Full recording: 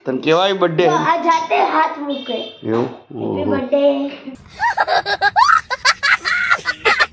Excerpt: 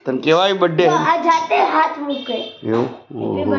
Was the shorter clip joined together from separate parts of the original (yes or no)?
no